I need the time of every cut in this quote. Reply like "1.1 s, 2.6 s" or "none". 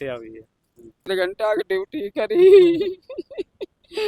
1.1 s